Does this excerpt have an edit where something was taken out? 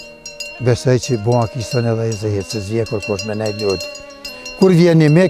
no; 0 cuts

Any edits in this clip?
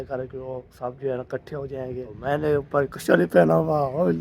yes; 1 cut; at 2.1 s

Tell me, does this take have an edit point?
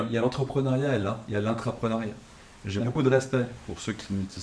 no; 0 cuts

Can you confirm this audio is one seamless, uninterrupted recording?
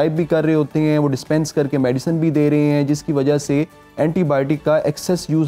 yes; 0 cuts

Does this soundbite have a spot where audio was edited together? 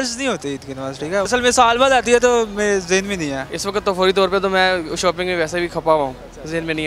yes; 2 cuts; at 1.3 s, 3.5 s

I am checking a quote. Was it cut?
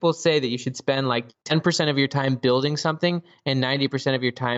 no; 0 cuts

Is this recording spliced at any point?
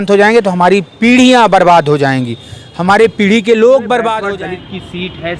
yes; 1 cut; at 4.2 s

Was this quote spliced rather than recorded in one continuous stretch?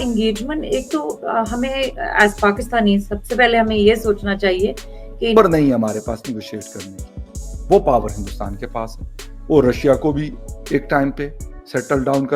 yes; 1 cut; at 5.3 s

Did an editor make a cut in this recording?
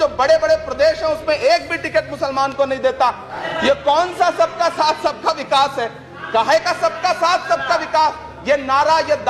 yes; 1 cut; at 3.4 s

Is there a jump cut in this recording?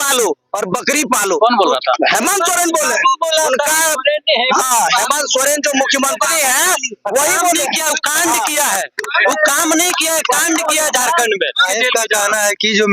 yes; 1 cut; at 11.7 s

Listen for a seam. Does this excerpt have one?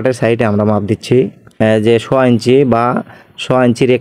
yes; 1 cut; at 1.4 s

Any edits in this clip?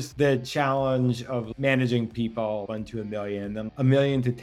no; 0 cuts

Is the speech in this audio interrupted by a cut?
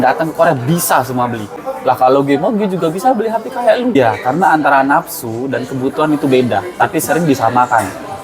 yes; 2 cuts; at 1.7 s, 3.9 s

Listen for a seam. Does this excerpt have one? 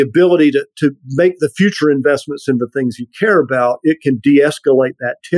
no; 0 cuts

